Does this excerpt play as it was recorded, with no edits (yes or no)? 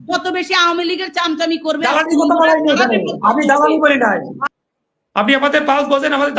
no